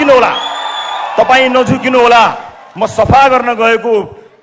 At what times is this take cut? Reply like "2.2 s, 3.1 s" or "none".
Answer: none